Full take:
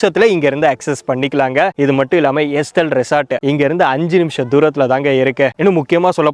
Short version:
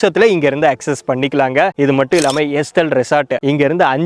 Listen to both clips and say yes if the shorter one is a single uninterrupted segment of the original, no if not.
yes